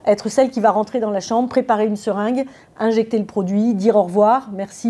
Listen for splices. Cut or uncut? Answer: uncut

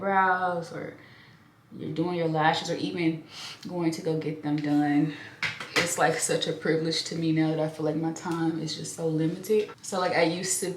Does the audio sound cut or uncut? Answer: cut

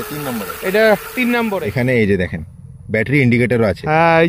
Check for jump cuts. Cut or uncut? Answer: cut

